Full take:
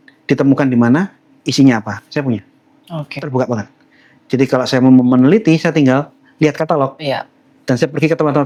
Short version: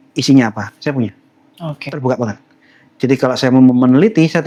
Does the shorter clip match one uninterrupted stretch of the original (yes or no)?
yes